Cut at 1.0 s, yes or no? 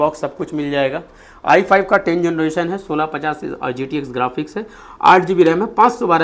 no